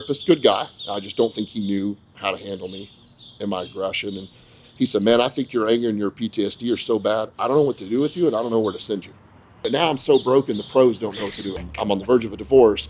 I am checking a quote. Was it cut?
yes; 2 cuts; at 9.7 s, 11.7 s

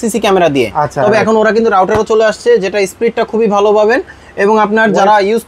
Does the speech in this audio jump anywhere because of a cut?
no; 0 cuts

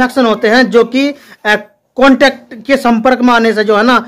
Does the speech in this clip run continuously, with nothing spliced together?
yes; 0 cuts

